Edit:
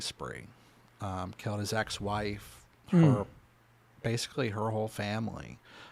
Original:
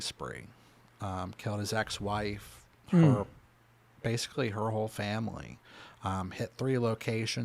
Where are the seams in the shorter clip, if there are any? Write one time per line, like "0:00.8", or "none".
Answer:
none